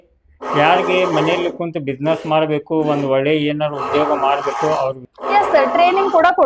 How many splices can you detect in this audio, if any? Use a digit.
1